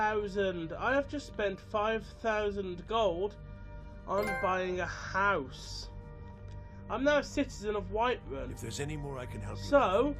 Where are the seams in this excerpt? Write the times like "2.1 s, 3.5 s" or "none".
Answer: 3.9 s